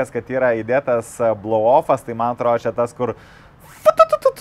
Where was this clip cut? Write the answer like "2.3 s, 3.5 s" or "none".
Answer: none